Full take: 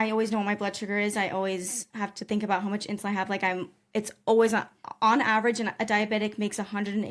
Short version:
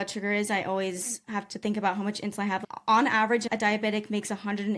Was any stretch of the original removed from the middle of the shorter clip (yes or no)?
yes